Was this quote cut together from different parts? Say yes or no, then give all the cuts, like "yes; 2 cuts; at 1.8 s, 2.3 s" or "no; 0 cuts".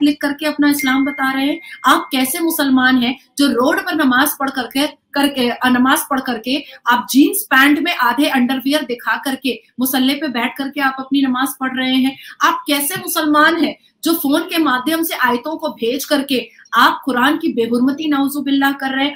no; 0 cuts